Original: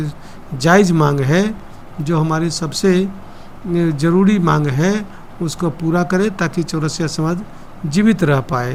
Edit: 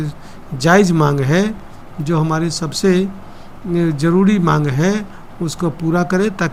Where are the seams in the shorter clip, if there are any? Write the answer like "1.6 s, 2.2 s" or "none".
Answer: none